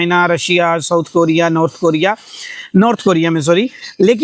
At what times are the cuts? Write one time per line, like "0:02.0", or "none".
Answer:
none